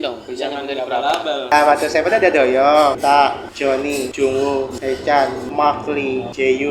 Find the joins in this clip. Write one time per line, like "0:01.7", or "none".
0:01.5